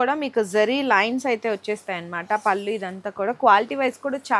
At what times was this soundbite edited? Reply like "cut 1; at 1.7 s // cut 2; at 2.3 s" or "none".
none

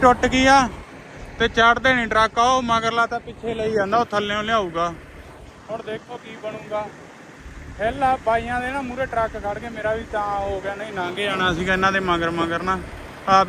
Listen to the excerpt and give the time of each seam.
none

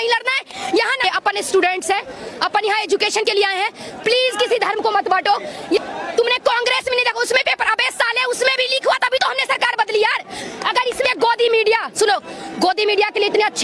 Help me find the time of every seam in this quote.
cut 1; at 1.0 s // cut 2; at 5.8 s // cut 3; at 11.1 s

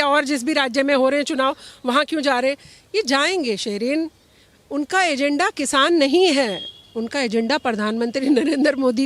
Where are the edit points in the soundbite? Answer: none

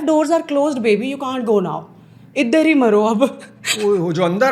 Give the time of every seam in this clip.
none

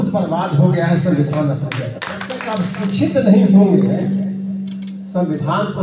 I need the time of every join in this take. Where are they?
cut 1; at 2.5 s

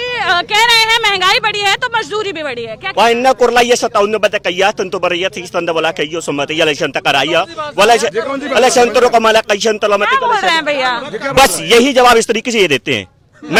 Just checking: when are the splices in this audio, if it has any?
none

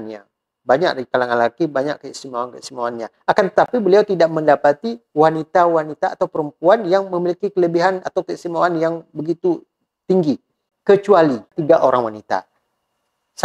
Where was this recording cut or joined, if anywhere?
cut 1; at 10.7 s // cut 2; at 11.6 s

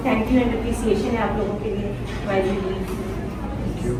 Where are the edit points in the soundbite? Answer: none

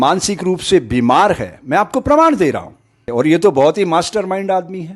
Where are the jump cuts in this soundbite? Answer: cut 1; at 3.0 s

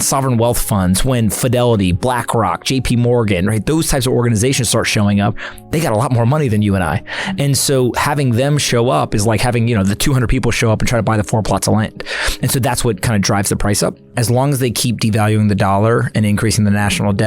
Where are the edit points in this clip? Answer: cut 1; at 14.1 s

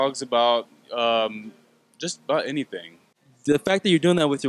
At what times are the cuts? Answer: cut 1; at 3.2 s

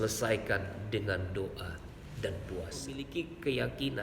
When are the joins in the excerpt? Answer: cut 1; at 3.0 s

